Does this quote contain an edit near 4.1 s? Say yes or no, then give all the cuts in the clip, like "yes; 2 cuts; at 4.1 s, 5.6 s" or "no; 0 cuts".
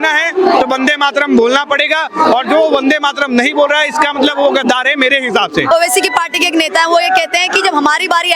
no; 1 cut; at 5.7 s